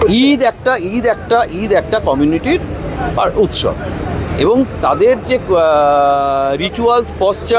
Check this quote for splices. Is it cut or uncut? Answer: uncut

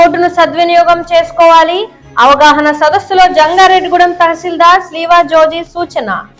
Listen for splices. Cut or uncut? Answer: uncut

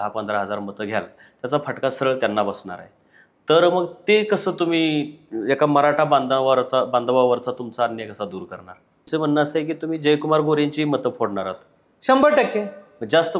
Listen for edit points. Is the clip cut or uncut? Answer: cut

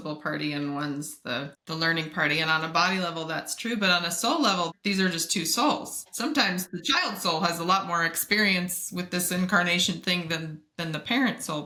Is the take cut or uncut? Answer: uncut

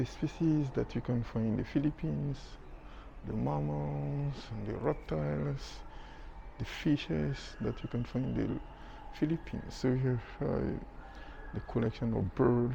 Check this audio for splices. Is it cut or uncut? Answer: uncut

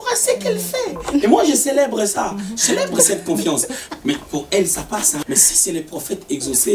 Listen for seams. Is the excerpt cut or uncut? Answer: cut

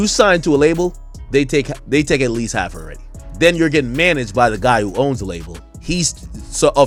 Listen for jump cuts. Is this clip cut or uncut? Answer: uncut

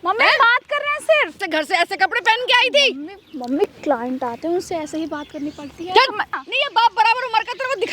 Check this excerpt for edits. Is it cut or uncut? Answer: cut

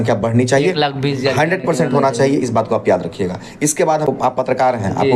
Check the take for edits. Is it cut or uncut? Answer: cut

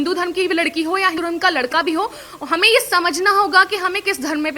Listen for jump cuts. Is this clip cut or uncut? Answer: cut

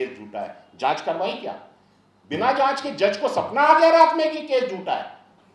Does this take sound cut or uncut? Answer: uncut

